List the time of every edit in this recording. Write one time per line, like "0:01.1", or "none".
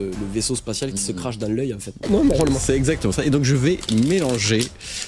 0:02.0